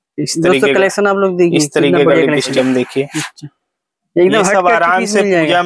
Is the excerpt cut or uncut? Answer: cut